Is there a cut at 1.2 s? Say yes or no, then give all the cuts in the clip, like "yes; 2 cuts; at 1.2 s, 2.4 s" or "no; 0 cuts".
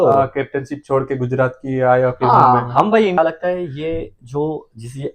no; 1 cut; at 3.2 s